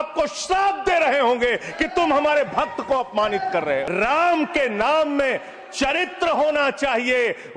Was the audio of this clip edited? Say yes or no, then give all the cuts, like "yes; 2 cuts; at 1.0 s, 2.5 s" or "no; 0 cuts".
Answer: yes; 1 cut; at 3.9 s